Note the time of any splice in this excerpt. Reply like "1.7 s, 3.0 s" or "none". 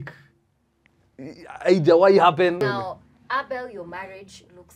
2.6 s

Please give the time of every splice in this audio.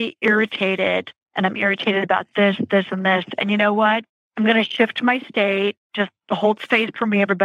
1.2 s, 4.2 s

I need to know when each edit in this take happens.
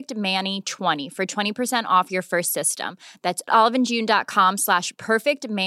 none

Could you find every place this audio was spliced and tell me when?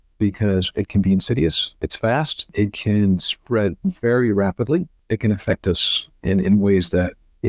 2.5 s, 5.0 s

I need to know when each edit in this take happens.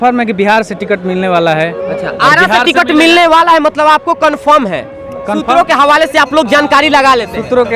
none

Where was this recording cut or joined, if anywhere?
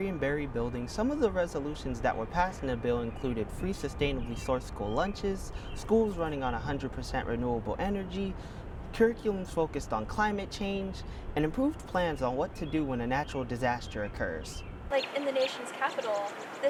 none

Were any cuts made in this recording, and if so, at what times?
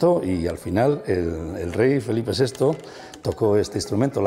none

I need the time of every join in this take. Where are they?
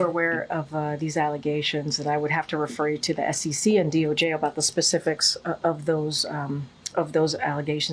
none

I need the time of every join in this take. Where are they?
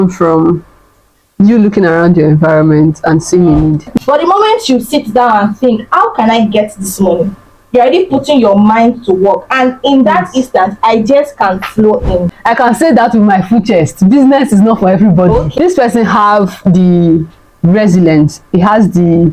3.9 s, 12.3 s, 15.5 s

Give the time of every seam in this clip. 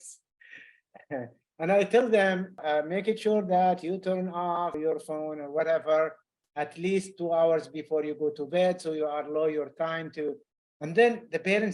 2.6 s, 4.8 s

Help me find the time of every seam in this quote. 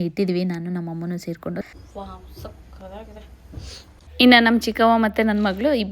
1.7 s, 4.0 s

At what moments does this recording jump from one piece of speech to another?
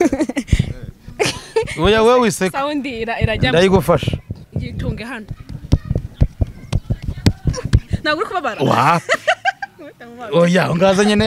none

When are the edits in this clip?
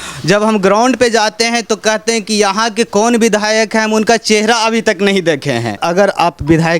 5.8 s

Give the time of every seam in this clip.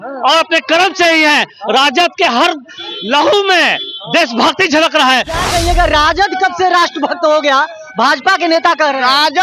5.4 s

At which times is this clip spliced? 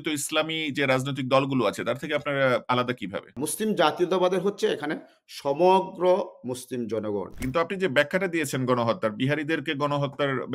3.3 s, 7.3 s

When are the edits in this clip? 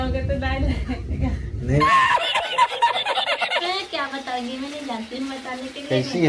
1.8 s, 3.6 s

